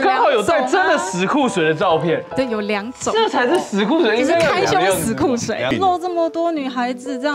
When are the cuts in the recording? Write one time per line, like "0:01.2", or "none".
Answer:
0:05.7